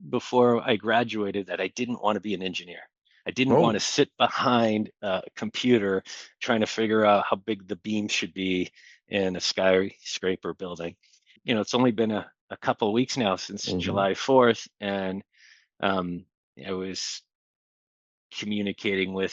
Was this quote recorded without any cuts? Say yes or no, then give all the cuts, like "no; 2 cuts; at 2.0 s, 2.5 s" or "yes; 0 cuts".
no; 1 cut; at 11.3 s